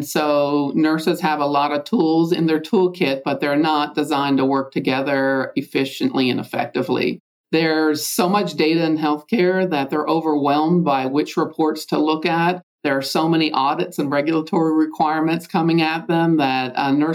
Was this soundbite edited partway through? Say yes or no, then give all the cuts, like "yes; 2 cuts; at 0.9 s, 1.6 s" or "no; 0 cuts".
no; 0 cuts